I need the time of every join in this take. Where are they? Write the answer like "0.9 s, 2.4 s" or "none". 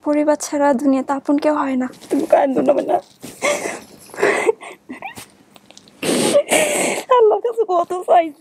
2.0 s